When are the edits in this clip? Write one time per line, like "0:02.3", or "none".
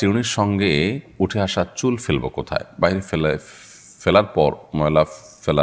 none